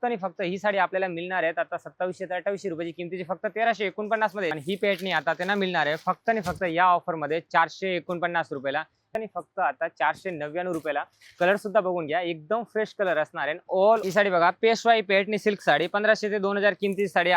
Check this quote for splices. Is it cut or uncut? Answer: cut